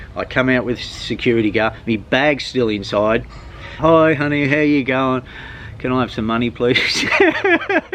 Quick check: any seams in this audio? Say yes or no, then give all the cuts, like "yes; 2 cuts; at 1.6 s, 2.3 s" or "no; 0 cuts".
yes; 1 cut; at 3.8 s